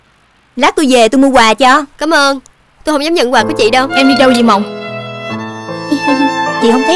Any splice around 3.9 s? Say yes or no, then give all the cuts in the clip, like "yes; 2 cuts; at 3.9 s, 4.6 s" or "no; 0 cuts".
yes; 1 cut; at 3.9 s